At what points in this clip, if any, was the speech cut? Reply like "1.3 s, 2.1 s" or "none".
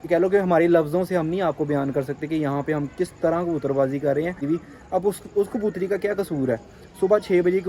4.4 s